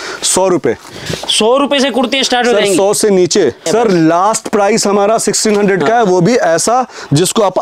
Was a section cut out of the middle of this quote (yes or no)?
yes